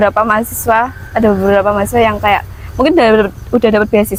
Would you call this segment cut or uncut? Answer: uncut